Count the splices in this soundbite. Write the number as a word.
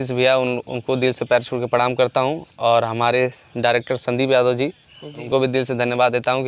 one